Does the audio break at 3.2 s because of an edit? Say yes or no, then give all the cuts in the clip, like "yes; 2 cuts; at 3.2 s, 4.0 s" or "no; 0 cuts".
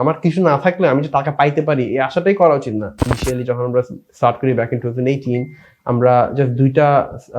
yes; 1 cut; at 3.2 s